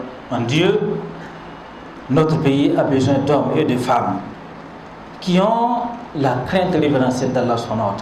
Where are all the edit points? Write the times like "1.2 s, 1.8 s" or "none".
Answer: none